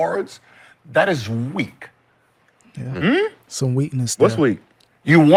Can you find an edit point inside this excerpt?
no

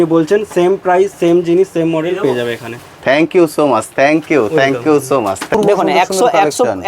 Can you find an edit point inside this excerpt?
yes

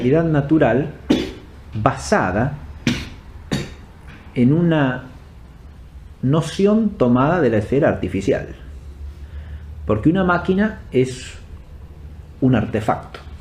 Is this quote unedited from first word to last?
yes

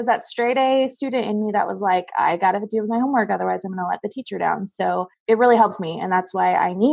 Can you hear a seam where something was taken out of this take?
yes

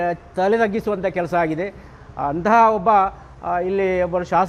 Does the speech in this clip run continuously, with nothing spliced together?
yes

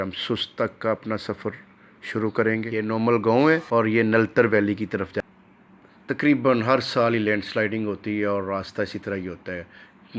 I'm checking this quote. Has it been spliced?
yes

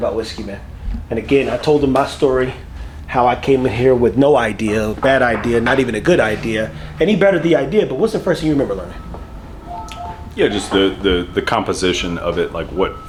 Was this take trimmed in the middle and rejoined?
no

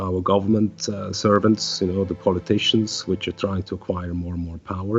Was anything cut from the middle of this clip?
no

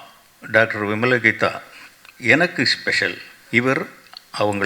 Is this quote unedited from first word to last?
no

